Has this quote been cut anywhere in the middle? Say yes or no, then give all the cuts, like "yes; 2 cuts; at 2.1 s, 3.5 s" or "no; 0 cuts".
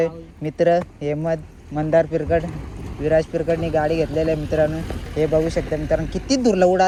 no; 0 cuts